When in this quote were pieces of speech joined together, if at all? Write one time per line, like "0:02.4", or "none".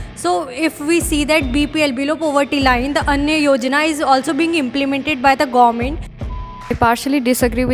0:03.1
0:06.3